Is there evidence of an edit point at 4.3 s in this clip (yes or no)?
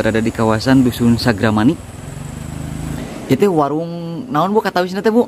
no